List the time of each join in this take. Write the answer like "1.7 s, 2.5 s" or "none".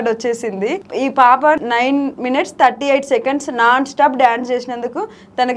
0.8 s, 1.7 s